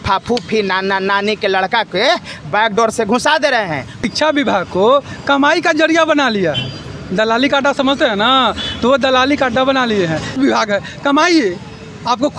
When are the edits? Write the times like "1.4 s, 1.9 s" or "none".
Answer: 4.1 s, 10.3 s